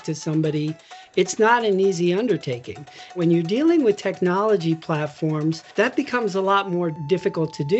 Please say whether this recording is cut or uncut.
cut